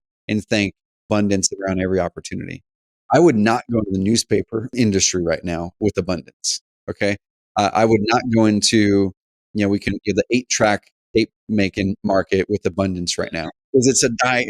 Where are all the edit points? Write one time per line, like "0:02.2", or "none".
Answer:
0:02.9
0:04.7